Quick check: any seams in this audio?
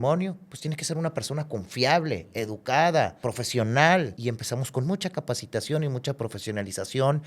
yes; 2 cuts; at 3.2 s, 4.1 s

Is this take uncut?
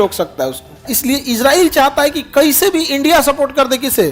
no; 1 cut; at 0.9 s

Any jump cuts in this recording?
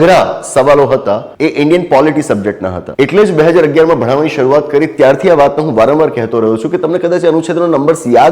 yes; 2 cuts; at 1.3 s, 2.8 s

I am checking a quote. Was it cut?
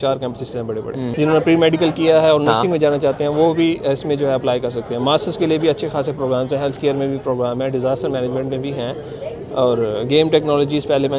yes; 1 cut; at 1.1 s

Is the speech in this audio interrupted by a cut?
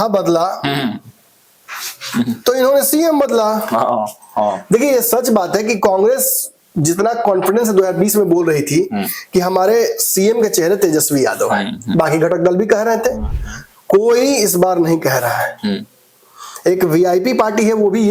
no; 0 cuts

